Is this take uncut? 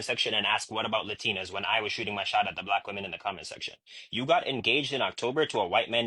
yes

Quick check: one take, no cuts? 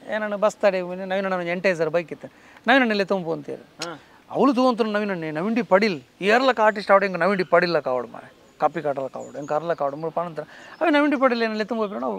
yes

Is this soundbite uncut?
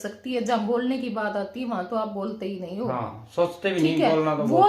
yes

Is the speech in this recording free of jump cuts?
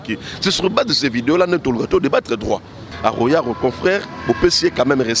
no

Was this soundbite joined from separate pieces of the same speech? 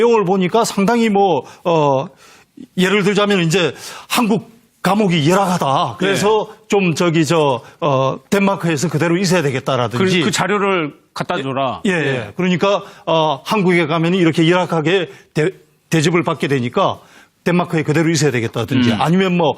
yes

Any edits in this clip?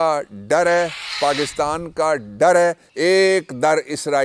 yes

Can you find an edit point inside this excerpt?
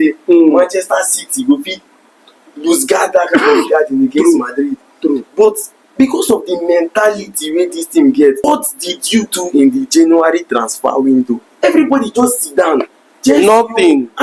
yes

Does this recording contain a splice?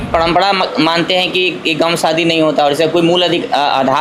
no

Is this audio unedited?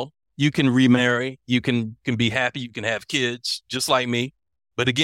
yes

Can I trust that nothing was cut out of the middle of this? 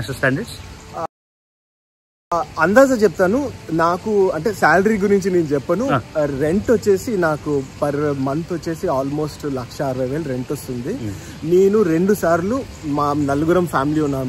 yes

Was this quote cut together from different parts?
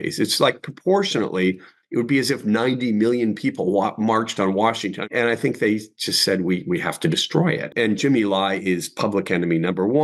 yes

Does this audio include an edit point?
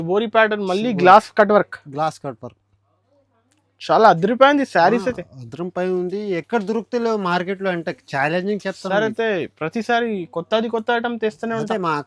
no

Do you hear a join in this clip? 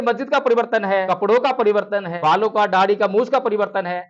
yes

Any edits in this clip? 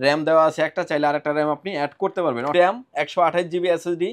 yes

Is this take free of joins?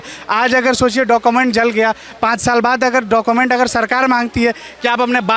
yes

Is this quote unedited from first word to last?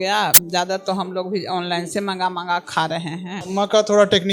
no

